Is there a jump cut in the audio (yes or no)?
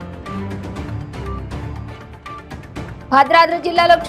yes